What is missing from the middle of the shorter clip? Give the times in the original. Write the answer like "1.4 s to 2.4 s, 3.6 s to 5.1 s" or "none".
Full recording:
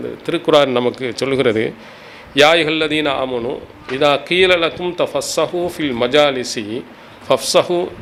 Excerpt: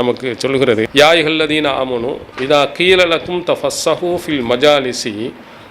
1.7 s to 2.3 s, 3.7 s to 3.8 s